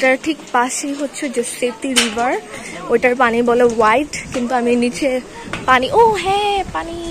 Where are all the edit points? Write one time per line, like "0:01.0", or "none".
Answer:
none